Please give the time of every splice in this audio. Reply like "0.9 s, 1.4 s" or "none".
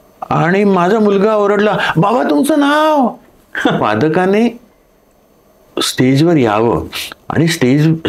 3.8 s